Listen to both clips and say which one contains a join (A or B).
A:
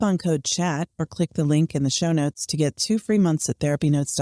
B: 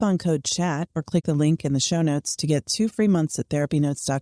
B